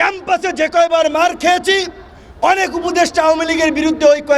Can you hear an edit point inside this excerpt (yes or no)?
no